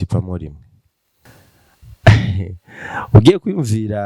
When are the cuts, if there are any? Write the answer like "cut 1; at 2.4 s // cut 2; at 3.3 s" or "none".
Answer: cut 1; at 1.3 s